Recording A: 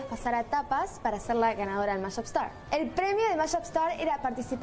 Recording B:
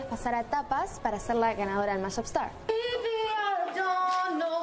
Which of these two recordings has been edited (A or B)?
B